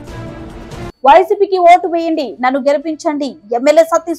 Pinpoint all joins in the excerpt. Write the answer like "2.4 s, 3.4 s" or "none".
1.0 s